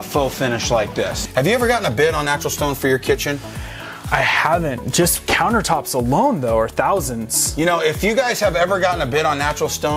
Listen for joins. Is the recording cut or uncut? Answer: cut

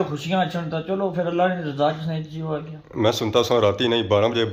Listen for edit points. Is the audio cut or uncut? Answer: uncut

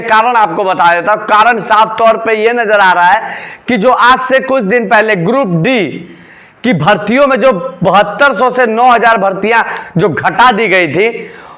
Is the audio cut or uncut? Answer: uncut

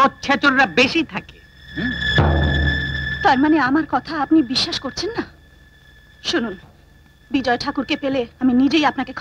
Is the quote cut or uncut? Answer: uncut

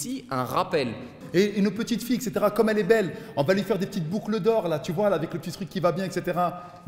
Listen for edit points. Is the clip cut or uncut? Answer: cut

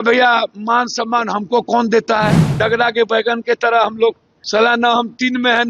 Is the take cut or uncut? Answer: cut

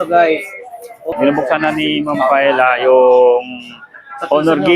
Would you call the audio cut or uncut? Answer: cut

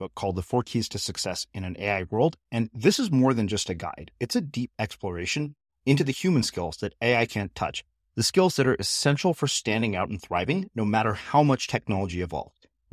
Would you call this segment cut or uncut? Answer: uncut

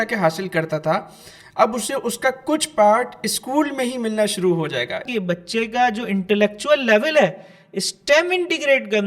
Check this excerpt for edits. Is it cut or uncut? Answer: cut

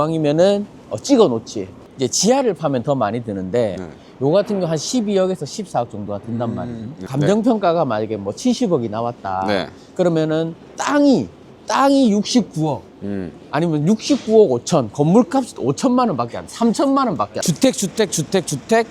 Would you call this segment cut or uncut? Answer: cut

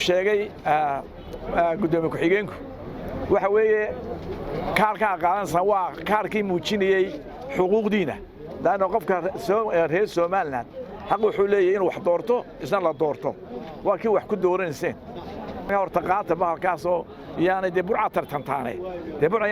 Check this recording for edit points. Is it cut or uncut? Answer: cut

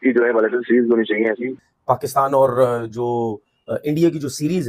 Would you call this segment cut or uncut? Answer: cut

